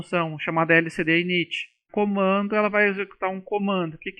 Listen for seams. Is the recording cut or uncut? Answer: cut